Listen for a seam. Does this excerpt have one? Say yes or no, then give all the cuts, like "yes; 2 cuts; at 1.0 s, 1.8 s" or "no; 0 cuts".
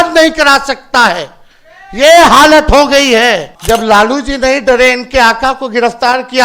yes; 1 cut; at 3.5 s